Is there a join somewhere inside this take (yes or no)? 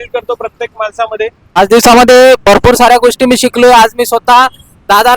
yes